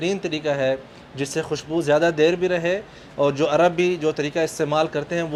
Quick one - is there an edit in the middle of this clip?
no; 0 cuts

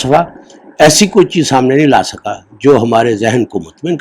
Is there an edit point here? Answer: no; 0 cuts

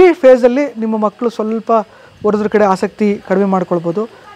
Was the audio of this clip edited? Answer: no; 0 cuts

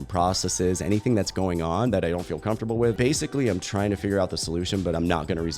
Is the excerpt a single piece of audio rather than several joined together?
no; 1 cut; at 2.9 s

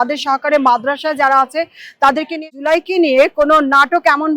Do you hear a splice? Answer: yes; 1 cut; at 2.5 s

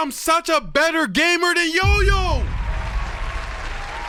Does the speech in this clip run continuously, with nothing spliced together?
yes; 0 cuts

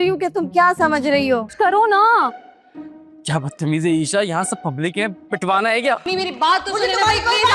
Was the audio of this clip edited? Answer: yes; 2 cuts; at 1.5 s, 6.1 s

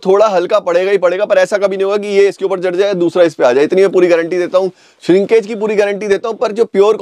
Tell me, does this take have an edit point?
no; 0 cuts

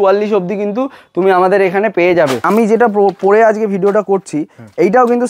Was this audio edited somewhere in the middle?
yes; 1 cut; at 2.4 s

